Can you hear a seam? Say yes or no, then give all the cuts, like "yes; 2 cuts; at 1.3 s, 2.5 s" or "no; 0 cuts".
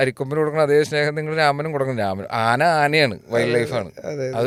no; 0 cuts